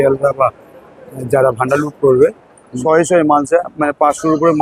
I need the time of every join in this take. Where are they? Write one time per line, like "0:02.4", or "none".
0:02.8